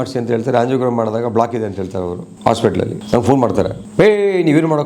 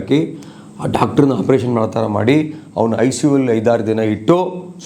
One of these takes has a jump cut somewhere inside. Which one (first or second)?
first